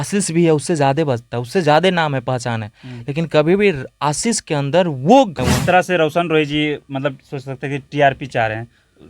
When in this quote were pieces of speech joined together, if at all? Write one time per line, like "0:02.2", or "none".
0:05.4